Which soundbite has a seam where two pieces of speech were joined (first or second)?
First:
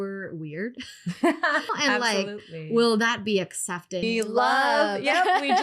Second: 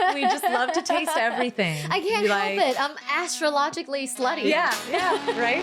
first